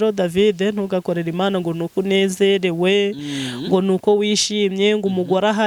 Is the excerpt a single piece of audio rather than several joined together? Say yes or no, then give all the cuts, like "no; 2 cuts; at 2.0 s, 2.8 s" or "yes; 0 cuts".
yes; 0 cuts